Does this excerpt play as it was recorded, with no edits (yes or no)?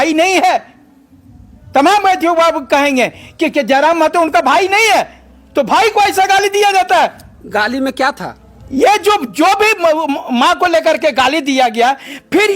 yes